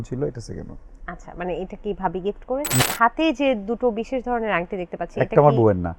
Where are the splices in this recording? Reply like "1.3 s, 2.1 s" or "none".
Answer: 2.8 s